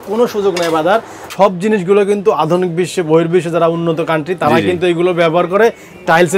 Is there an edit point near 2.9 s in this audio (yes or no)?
no